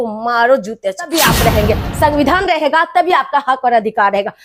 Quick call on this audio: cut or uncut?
cut